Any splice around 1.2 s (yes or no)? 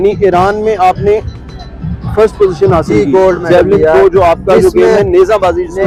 no